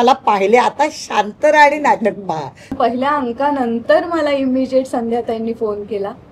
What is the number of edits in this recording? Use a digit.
1